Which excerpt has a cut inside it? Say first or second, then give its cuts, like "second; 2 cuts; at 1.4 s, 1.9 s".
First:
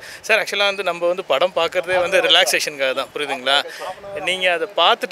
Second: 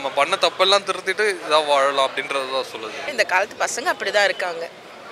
second; 1 cut; at 3.0 s